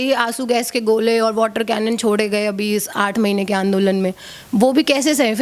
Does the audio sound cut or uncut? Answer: uncut